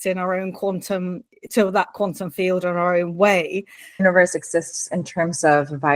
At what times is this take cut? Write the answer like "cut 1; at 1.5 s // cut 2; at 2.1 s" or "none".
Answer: cut 1; at 4.0 s